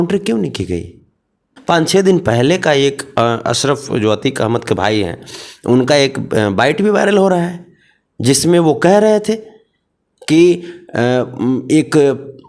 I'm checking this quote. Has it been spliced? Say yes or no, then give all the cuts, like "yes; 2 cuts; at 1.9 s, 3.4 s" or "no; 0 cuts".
yes; 1 cut; at 1.5 s